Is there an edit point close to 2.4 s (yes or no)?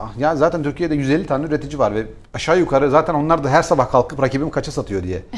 no